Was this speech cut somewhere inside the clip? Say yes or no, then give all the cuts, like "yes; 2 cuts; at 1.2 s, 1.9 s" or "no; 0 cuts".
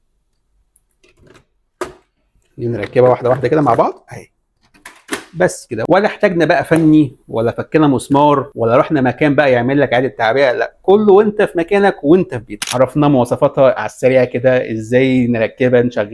yes; 2 cuts; at 8.5 s, 12.6 s